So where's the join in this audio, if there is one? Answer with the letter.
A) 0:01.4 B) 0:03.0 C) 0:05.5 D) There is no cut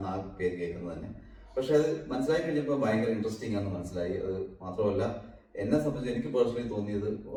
D